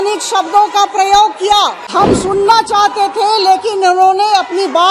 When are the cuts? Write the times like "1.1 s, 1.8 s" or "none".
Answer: 1.9 s